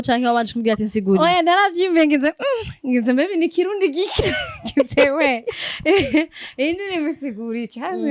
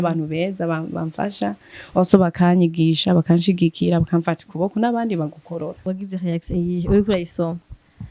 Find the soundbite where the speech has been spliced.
second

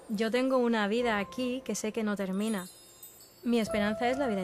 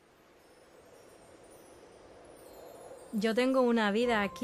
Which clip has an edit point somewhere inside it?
first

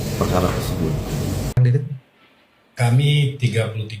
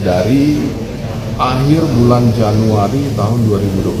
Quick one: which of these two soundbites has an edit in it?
first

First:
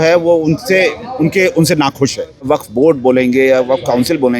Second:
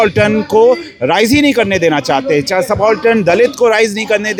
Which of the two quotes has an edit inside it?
first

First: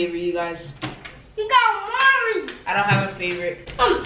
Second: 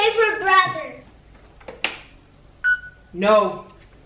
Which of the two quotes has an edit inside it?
second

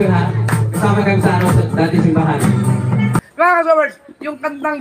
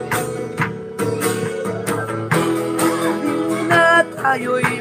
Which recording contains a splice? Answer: first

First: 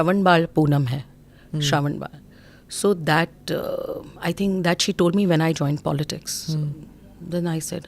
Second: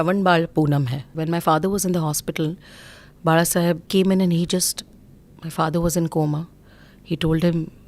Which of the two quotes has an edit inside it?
second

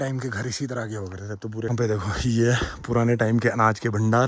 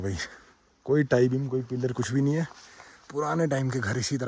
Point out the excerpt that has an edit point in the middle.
first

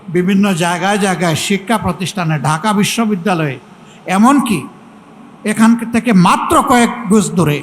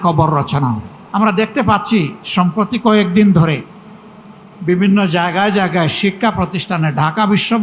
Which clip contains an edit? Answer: second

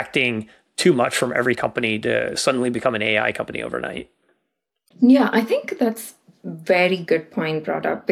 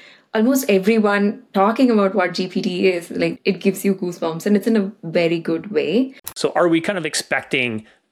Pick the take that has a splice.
second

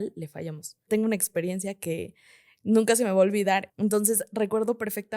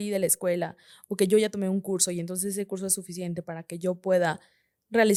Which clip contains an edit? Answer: first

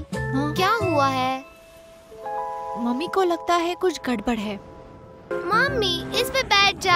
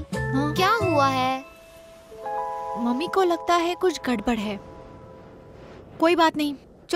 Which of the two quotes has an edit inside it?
first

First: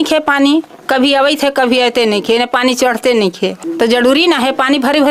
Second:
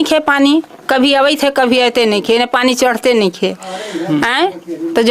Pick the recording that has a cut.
first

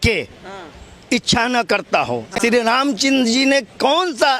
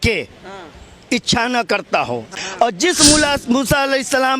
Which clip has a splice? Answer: second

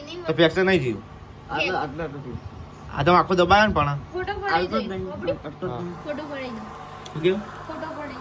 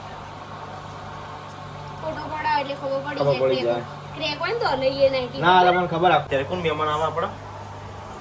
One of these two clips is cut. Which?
second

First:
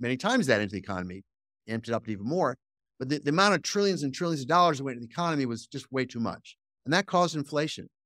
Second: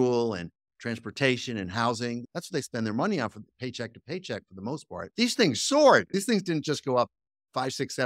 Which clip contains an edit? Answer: second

